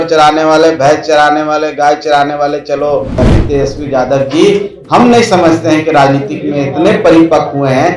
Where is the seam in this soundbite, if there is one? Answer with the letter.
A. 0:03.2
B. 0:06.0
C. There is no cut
A